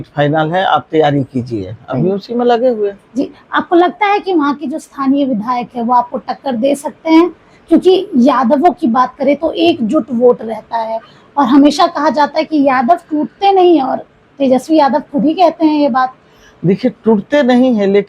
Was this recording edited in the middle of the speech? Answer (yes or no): no